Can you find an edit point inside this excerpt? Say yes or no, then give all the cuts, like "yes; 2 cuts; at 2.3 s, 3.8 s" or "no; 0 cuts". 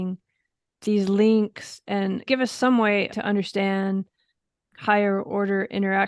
yes; 3 cuts; at 2.2 s, 3.1 s, 4.7 s